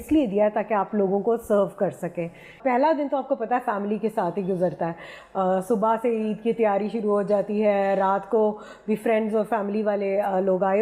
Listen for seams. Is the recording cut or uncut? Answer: cut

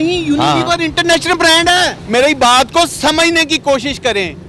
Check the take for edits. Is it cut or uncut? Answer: cut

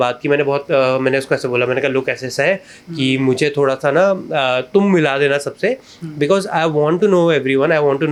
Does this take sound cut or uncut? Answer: uncut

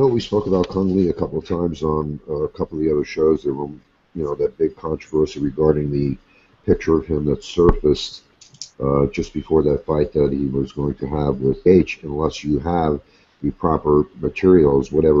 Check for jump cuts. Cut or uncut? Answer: uncut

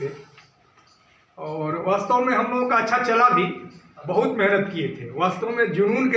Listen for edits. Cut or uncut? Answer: uncut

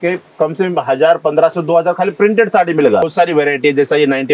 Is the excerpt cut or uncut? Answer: cut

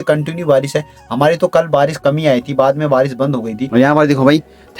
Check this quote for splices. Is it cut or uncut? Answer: cut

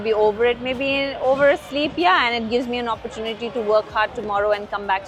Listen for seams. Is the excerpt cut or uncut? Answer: uncut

